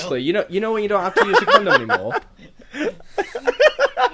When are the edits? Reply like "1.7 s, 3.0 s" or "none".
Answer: 1.1 s